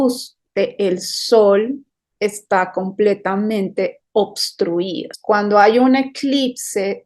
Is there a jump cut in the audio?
yes; 1 cut; at 5.1 s

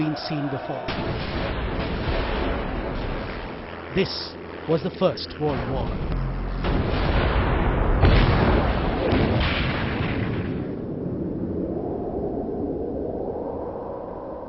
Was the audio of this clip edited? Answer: no; 0 cuts

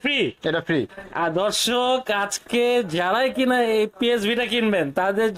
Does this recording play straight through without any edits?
yes; 0 cuts

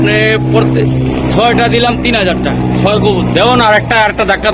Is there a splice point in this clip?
no; 0 cuts

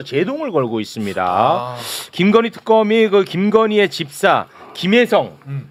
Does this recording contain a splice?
no; 0 cuts

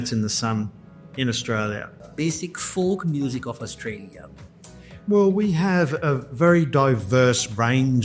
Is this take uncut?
no; 1 cut; at 2.0 s

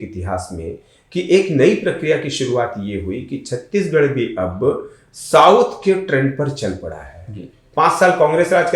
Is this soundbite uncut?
yes; 0 cuts

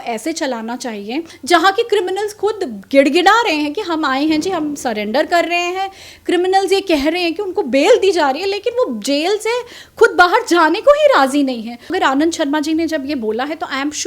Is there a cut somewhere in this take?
yes; 2 cuts; at 1.3 s, 11.9 s

